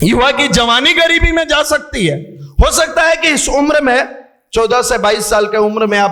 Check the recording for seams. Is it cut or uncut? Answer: uncut